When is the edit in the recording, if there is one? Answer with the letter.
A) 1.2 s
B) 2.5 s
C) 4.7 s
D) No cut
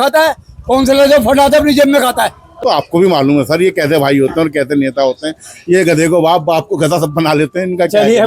B